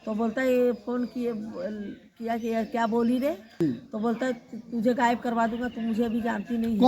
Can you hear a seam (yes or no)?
yes